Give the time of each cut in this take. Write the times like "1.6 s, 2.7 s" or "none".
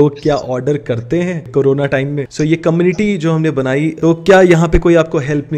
1.5 s, 2.3 s, 4.0 s